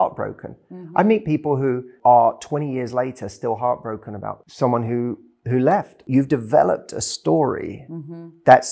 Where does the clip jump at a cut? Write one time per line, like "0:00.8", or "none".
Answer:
0:01.9
0:04.4
0:06.0